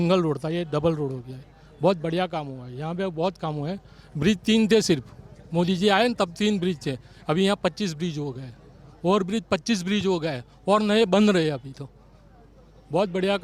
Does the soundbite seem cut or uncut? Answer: uncut